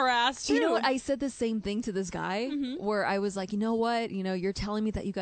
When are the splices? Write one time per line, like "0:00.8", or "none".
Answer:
none